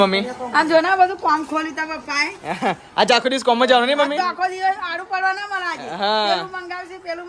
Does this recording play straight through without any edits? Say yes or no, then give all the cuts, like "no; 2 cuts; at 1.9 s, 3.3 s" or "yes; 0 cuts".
yes; 0 cuts